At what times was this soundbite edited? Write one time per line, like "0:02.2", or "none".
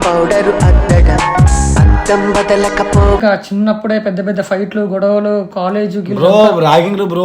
0:03.2